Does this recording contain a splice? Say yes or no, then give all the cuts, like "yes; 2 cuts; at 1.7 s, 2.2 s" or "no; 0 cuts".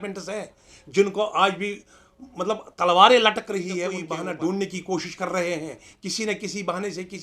yes; 1 cut; at 4.0 s